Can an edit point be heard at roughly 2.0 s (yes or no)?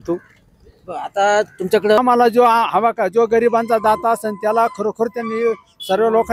yes